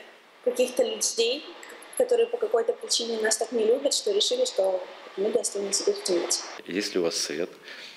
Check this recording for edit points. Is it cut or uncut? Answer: cut